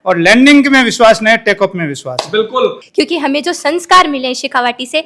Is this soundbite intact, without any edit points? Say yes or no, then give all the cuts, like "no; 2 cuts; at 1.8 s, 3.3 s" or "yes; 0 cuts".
no; 1 cut; at 2.8 s